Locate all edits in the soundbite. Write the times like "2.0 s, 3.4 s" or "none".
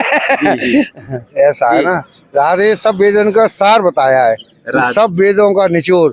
1.3 s